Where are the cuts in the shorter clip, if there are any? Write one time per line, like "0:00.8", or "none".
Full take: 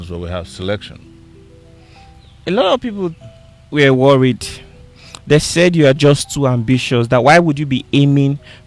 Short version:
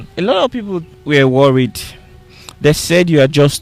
0:00.9